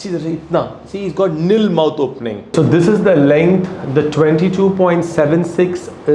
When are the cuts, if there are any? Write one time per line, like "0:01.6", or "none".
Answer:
0:02.5